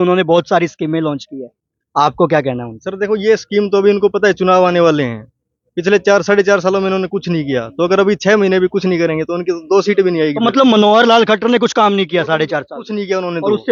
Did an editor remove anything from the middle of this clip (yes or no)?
no